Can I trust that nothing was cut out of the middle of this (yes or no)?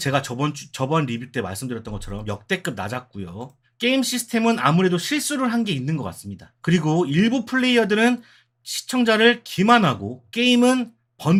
yes